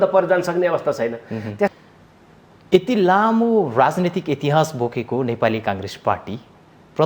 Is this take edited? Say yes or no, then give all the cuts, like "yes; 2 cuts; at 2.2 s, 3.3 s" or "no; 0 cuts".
yes; 1 cut; at 1.7 s